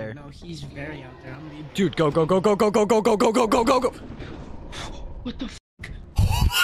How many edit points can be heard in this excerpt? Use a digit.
1